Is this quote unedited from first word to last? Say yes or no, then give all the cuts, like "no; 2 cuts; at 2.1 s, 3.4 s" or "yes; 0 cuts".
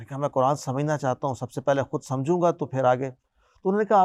yes; 0 cuts